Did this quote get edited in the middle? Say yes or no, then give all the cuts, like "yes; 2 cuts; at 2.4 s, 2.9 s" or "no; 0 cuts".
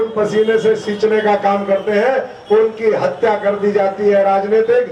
no; 0 cuts